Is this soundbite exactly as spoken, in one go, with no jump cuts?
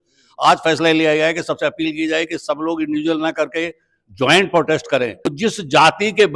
no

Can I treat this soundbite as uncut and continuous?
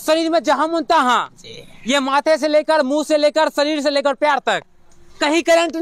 yes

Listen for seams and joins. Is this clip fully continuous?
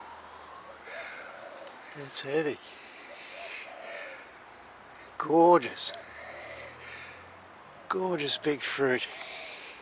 yes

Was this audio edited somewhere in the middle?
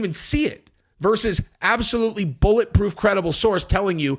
no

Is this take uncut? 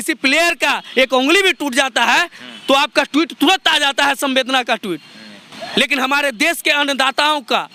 yes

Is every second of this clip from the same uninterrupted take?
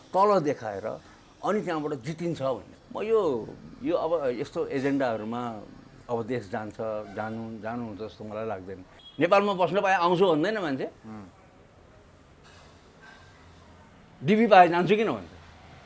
no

